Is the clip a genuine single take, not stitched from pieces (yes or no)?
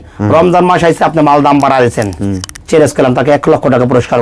yes